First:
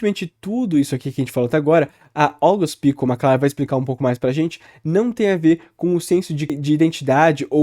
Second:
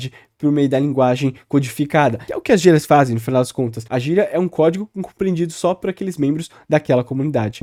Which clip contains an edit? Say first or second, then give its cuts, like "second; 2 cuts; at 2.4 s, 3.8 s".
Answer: first; 1 cut; at 6.4 s